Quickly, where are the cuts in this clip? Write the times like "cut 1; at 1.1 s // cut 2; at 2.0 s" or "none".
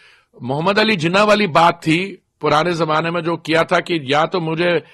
none